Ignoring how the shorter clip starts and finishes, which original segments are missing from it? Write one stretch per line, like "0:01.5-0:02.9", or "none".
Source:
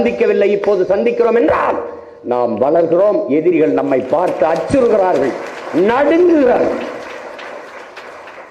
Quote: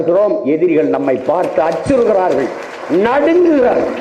none